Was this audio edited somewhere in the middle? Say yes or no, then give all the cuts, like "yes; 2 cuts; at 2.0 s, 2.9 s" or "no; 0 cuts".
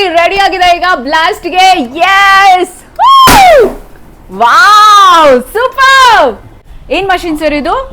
yes; 1 cut; at 6.5 s